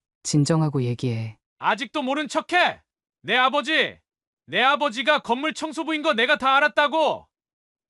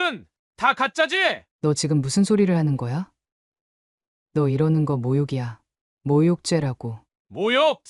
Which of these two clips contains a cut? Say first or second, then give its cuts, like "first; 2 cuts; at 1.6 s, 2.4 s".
second; 1 cut; at 1.4 s